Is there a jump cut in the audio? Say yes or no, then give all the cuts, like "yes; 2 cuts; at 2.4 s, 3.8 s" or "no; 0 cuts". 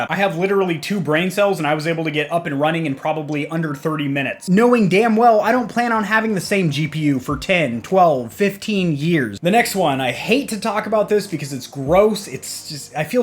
yes; 2 cuts; at 4.4 s, 9.3 s